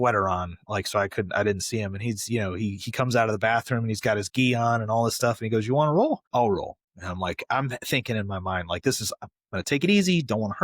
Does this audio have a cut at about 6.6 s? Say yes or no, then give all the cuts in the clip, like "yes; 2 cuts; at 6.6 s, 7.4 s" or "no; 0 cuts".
yes; 1 cut; at 6.6 s